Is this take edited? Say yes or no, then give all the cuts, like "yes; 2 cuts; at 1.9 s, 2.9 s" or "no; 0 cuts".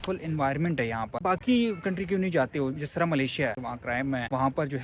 yes; 2 cuts; at 1.2 s, 3.6 s